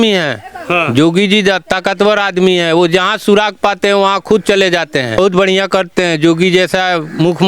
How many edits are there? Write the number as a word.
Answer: one